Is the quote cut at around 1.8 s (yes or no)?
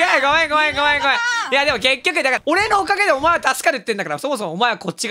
no